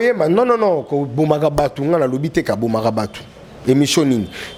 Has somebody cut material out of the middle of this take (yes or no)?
no